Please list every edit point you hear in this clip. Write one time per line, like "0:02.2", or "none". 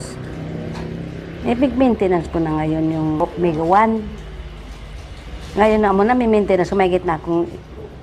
none